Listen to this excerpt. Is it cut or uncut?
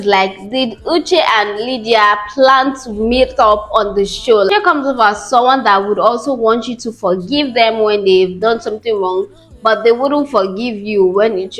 cut